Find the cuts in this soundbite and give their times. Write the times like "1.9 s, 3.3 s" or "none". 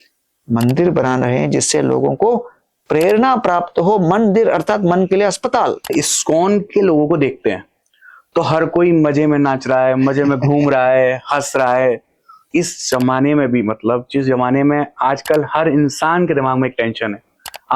5.9 s, 12.5 s

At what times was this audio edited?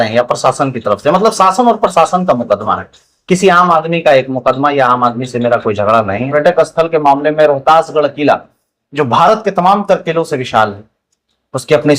6.3 s

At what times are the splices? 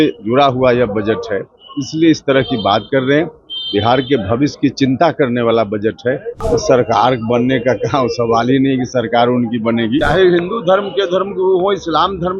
6.4 s, 10.0 s

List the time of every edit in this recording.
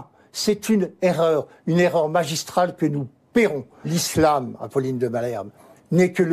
3.9 s

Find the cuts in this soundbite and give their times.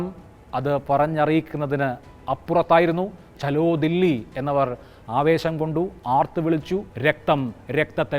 6.9 s

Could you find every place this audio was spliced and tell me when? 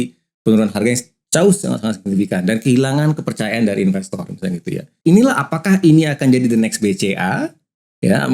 4.9 s

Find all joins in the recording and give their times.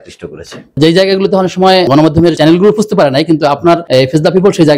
0.8 s, 2.0 s, 3.8 s

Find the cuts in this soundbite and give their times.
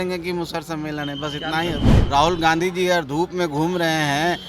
1.9 s

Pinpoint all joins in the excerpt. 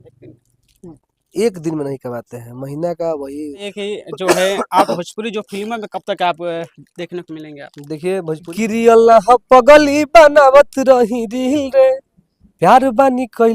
3.7 s, 8.5 s

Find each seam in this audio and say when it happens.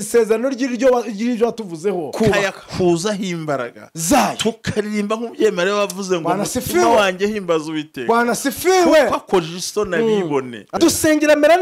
2.1 s, 10.7 s

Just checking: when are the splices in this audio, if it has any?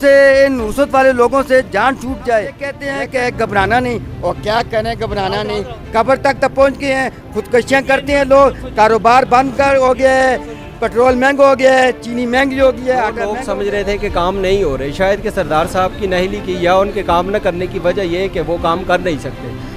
2.8 s, 13.3 s

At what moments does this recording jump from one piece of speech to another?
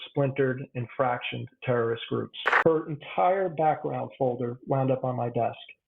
2.4 s

